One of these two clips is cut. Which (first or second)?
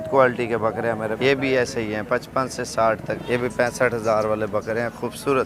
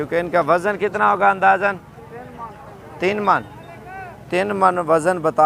first